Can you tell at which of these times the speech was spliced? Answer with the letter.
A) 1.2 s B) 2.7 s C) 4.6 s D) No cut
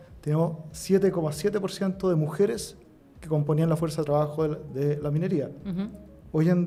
D